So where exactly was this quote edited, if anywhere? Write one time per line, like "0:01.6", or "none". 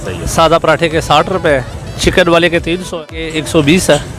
0:02.9

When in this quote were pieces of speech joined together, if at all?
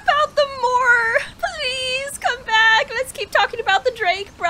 0:01.3

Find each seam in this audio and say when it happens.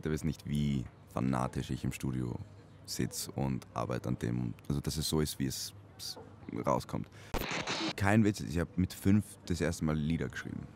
0:04.5
0:07.5

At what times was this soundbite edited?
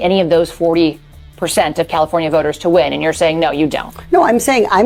none

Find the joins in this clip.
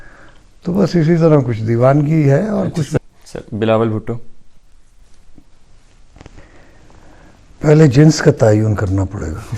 0:03.0

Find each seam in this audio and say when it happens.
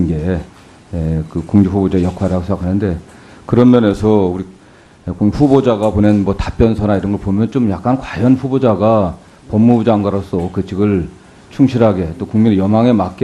0:01.8

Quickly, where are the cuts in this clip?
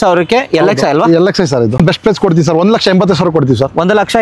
0:01.8

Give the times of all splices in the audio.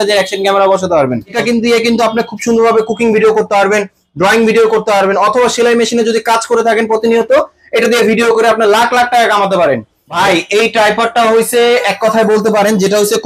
0:01.3
0:10.1

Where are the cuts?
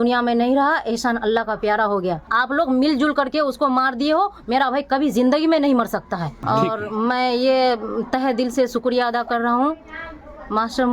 0:02.2
0:06.3

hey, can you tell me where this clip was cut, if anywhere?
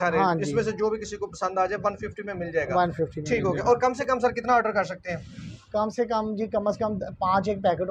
none

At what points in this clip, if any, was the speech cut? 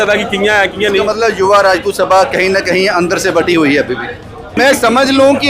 0:04.5

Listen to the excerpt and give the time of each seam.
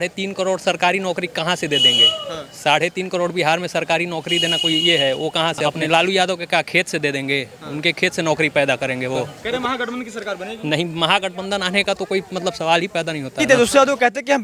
0:05.8
0:09.4
0:13.4

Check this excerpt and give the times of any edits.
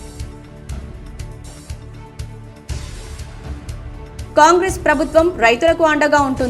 0:01.3

